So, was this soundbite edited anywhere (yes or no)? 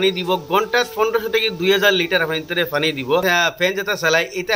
yes